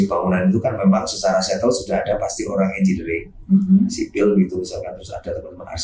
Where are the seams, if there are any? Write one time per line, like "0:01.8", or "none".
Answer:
none